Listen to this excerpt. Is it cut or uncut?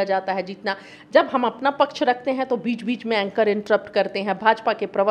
uncut